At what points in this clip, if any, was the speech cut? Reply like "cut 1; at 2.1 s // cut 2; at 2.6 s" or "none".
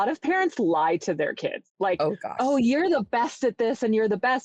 cut 1; at 1.6 s